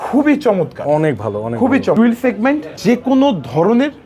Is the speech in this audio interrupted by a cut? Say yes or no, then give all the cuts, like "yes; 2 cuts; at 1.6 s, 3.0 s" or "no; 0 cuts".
yes; 2 cuts; at 2.0 s, 2.7 s